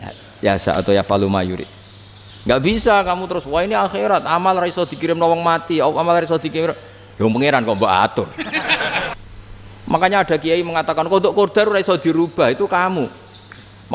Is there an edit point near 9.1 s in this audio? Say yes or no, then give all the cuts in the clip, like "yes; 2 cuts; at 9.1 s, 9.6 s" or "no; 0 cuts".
yes; 1 cut; at 9.1 s